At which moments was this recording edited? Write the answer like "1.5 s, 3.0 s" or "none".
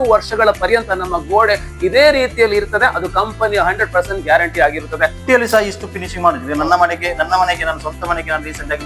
5.2 s